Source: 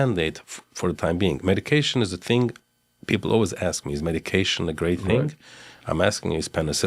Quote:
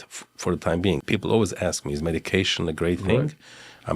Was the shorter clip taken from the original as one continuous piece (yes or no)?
no